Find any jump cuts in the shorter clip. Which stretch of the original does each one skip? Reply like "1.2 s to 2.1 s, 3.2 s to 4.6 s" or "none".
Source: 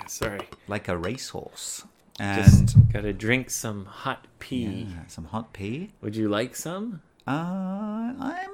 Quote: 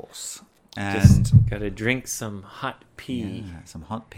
none